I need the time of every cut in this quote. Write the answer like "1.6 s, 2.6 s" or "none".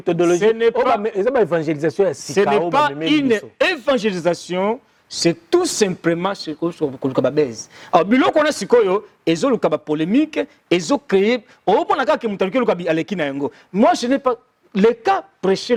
none